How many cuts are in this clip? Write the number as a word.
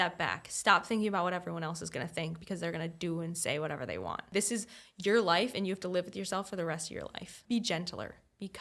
two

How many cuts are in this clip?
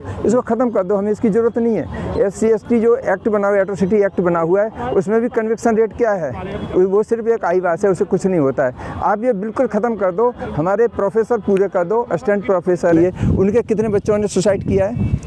one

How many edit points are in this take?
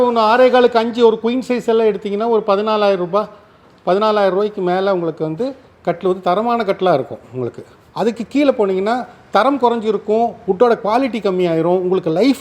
zero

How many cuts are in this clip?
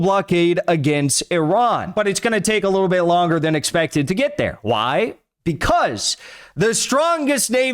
one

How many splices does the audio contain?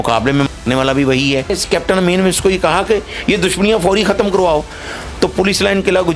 one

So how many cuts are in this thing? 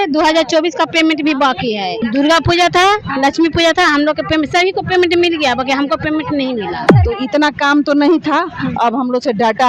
two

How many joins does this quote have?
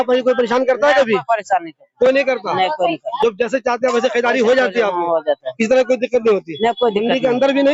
zero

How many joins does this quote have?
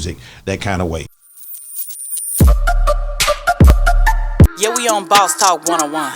one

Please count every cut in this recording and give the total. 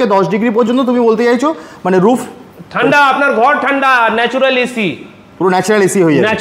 zero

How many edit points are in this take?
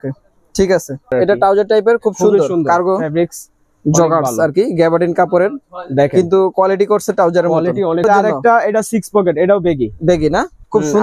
two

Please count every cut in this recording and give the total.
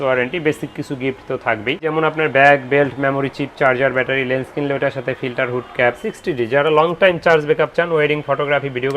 two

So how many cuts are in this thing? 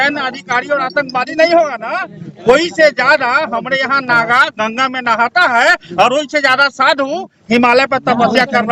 zero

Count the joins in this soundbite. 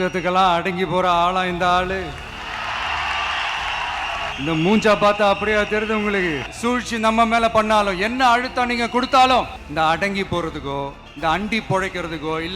four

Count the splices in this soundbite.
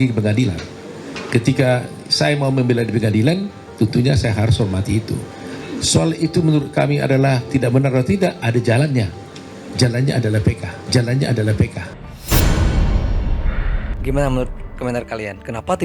one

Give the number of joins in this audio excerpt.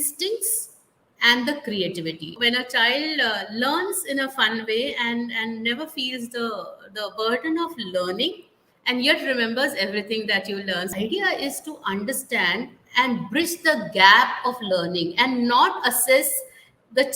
two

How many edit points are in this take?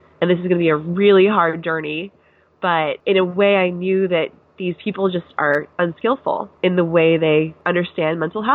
three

